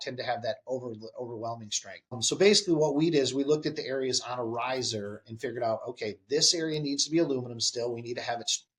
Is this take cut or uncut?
cut